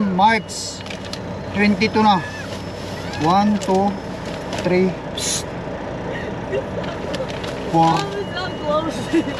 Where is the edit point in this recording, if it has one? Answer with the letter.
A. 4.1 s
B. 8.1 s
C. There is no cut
C